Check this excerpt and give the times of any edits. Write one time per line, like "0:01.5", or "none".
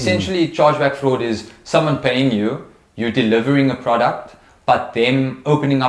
none